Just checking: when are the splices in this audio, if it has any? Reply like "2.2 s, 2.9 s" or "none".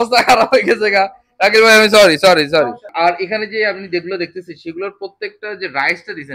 2.8 s